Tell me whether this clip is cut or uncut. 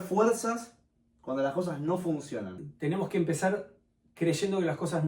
cut